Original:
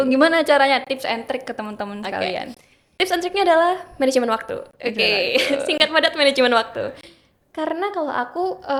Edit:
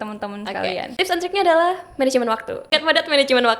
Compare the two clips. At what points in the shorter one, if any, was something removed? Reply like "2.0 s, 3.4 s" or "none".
0.9 s, 2.7 s